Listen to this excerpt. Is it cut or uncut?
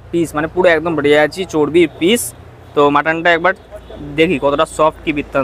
uncut